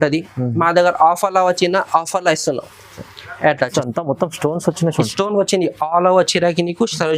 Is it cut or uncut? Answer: cut